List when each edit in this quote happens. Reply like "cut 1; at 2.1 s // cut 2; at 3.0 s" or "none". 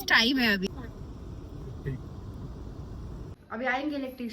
cut 1; at 0.7 s // cut 2; at 3.4 s